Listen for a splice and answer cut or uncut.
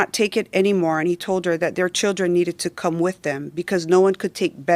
uncut